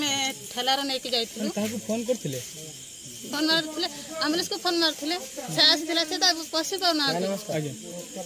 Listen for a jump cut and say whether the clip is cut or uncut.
uncut